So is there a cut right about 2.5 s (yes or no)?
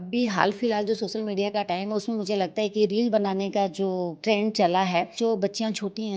no